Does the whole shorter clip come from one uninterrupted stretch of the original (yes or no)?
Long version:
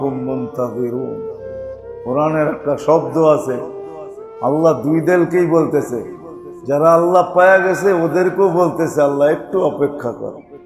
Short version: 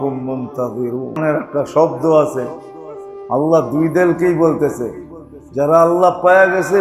no